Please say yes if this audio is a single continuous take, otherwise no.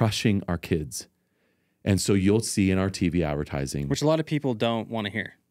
yes